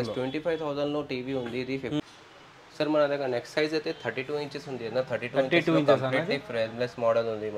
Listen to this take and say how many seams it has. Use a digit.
1